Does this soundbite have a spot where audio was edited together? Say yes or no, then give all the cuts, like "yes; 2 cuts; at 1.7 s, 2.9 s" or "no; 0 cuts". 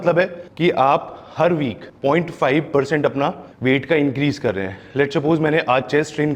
no; 0 cuts